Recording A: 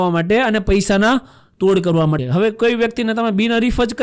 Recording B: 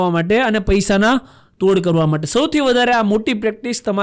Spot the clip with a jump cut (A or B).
A